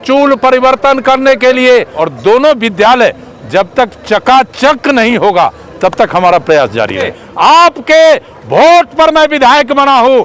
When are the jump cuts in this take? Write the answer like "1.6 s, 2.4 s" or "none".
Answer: 2.0 s, 7.2 s